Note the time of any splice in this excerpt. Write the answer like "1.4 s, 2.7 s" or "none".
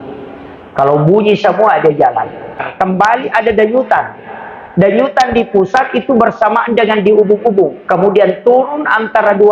2.6 s